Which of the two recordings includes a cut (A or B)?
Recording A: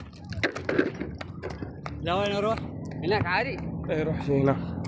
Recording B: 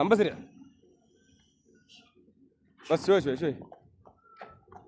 B